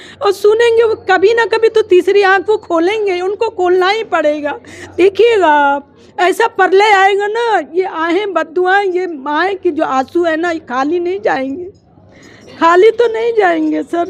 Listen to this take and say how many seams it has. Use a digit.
0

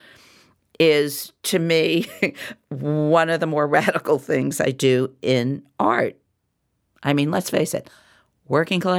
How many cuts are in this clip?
1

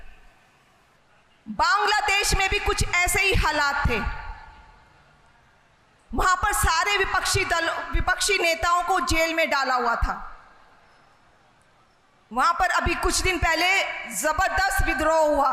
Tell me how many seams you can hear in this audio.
1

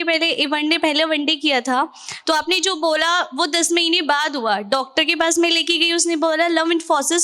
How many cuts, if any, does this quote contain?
0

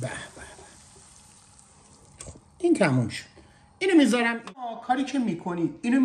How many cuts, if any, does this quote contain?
1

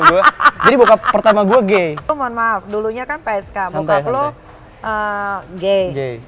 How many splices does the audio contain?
1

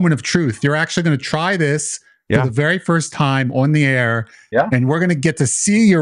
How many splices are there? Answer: 0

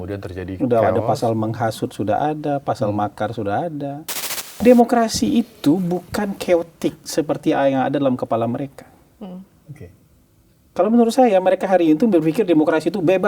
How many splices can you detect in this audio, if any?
1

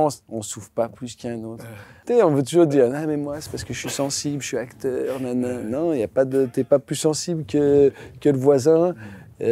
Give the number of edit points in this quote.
1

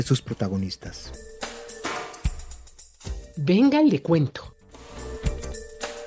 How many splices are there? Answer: 2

